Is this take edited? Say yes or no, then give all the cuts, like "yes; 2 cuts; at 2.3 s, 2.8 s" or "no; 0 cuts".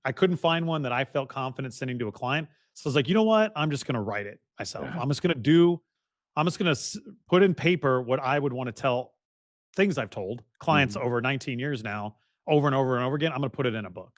no; 0 cuts